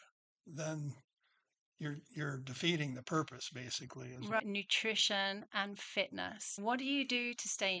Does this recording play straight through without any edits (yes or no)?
no